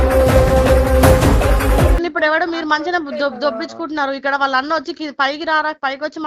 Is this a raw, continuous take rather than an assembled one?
no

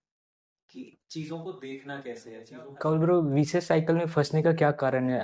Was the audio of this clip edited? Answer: yes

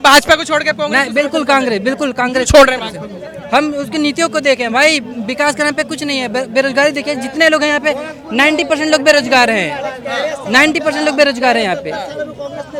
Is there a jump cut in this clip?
no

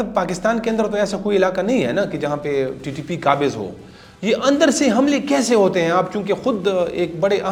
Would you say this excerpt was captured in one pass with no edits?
yes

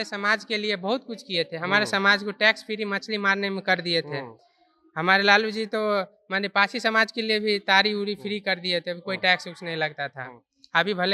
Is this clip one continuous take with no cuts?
yes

